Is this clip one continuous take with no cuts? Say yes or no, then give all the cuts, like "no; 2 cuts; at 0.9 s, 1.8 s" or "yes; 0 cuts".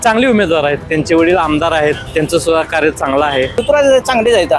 no; 3 cuts; at 0.8 s, 2.0 s, 3.6 s